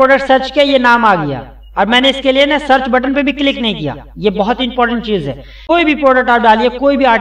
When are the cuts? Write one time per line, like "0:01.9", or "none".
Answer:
0:05.5